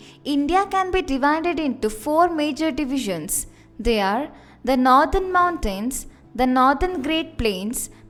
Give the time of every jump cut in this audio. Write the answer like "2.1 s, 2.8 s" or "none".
none

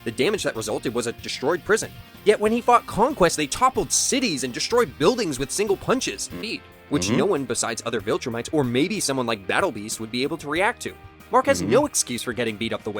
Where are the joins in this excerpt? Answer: 6.4 s

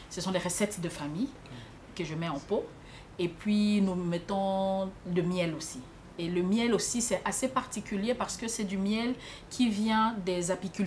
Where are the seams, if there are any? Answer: none

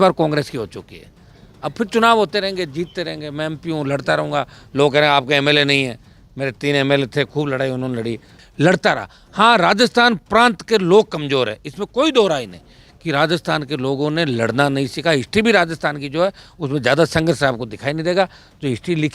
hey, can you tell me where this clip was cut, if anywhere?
8.4 s

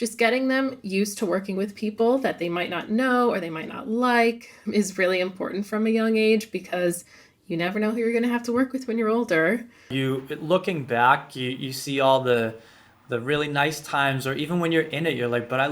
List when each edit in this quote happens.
9.9 s

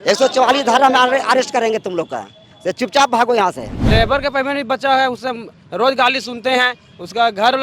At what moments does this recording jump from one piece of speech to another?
3.8 s

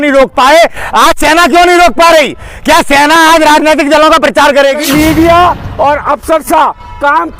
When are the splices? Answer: 4.8 s

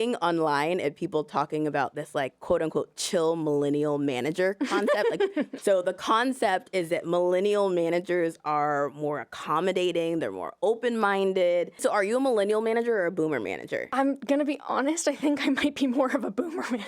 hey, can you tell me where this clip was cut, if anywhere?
5.5 s, 11.8 s, 13.9 s

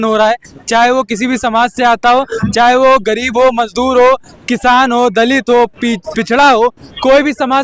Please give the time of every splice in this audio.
none

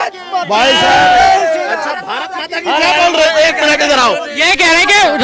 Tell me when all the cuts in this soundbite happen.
none

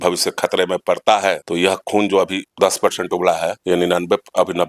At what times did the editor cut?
1.4 s, 2.4 s, 3.6 s

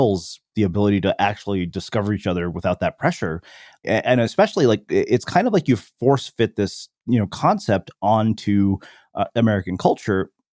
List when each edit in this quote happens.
3.8 s

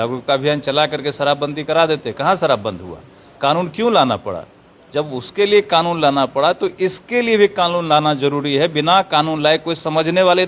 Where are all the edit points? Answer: none

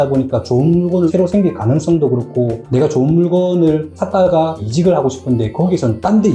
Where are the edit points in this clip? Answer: 4.6 s

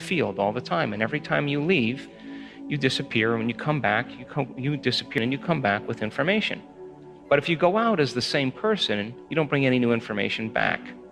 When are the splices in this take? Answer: 5.2 s

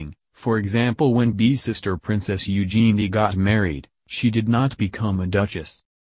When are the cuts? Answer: 1.3 s

